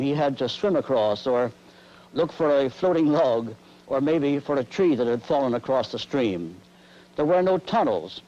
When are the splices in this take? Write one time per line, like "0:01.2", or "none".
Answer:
0:05.3